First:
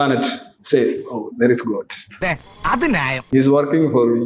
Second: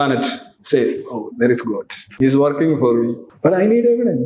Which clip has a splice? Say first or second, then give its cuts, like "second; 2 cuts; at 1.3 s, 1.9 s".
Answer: second; 2 cuts; at 2.0 s, 3.2 s